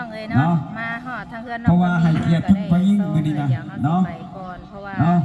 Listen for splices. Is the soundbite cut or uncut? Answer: uncut